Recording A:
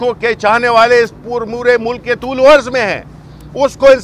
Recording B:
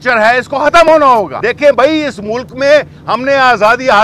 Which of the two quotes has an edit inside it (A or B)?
B